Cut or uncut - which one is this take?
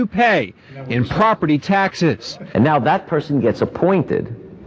cut